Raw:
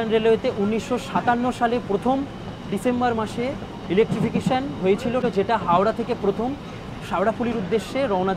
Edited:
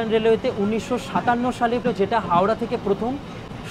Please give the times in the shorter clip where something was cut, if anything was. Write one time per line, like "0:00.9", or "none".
0:01.8

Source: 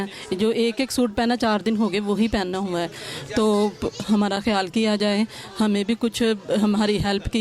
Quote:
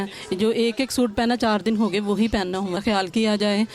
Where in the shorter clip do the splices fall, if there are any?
0:02.8

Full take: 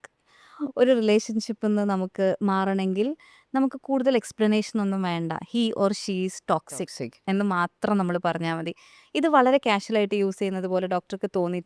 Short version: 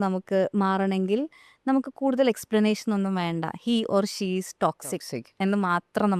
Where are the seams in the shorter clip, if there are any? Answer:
none

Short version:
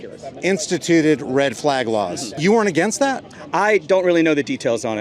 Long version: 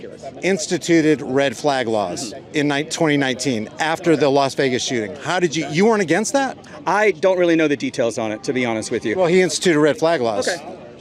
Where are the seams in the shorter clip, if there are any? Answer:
0:02.3

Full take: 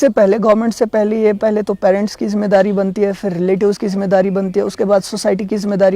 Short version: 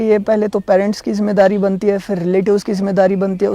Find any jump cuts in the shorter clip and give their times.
none

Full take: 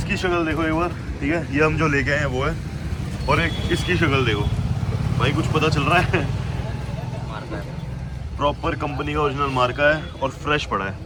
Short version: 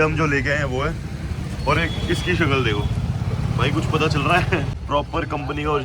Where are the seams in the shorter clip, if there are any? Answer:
0:04.8

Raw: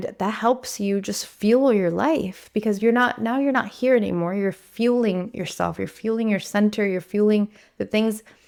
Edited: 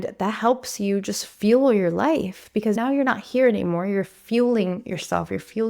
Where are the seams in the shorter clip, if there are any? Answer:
0:02.8

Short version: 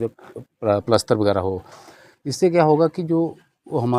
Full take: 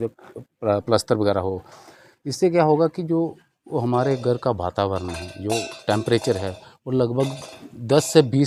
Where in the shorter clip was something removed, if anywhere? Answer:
none

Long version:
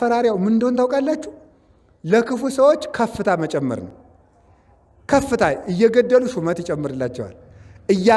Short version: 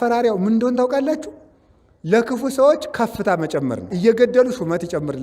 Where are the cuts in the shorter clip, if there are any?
0:03.9

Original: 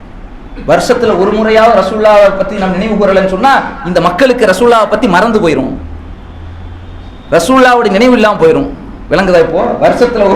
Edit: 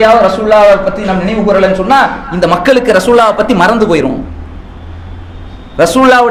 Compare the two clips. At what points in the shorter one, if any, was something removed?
none

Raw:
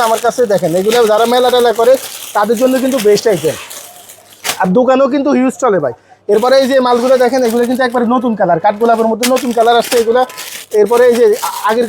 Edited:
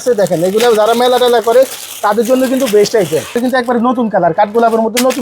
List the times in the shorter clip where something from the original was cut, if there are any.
0:03.4

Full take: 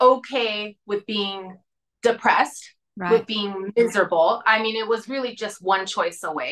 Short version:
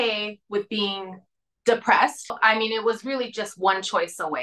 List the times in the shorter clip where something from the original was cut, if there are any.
0:02.4

